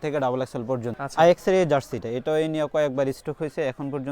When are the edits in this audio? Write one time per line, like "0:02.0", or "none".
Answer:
0:01.0